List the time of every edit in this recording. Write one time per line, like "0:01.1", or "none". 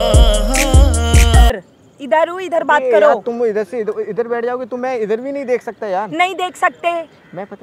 none